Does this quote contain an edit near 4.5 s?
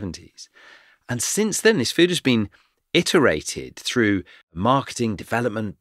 yes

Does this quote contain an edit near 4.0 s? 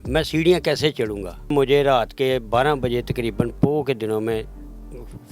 no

